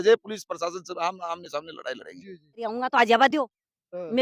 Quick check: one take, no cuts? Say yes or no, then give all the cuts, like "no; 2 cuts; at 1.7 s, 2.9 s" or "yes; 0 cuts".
no; 1 cut; at 2.6 s